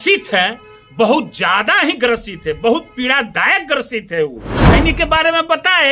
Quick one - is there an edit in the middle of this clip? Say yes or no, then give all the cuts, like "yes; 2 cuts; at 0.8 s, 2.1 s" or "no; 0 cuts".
yes; 1 cut; at 4.5 s